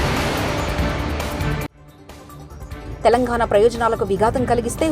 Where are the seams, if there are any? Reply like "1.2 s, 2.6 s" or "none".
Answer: 2.5 s